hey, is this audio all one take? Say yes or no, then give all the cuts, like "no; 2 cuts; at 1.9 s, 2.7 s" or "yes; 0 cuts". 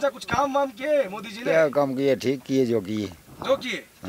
yes; 0 cuts